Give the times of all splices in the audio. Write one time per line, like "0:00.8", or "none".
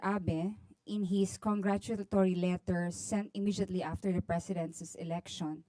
0:03.2